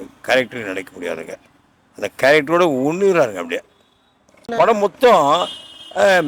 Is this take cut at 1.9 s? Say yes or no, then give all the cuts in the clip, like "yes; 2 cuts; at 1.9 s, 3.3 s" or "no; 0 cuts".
no; 1 cut; at 4.5 s